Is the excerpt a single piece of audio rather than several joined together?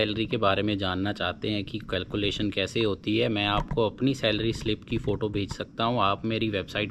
yes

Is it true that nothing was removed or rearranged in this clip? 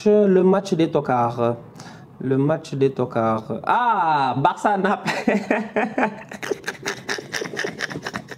yes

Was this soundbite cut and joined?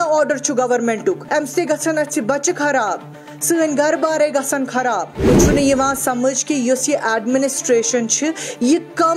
yes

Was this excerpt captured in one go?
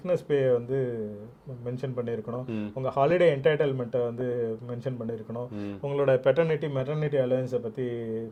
yes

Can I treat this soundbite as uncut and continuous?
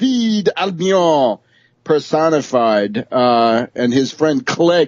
no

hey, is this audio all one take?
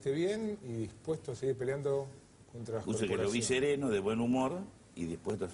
no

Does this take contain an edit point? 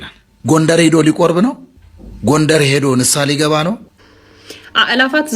yes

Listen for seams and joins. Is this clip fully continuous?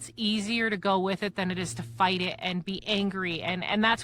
yes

